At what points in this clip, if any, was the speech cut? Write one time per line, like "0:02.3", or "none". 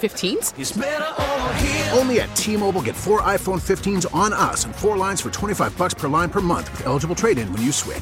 none